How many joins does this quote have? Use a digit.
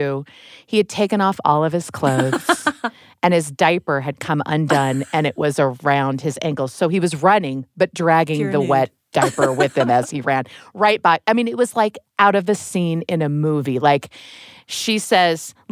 0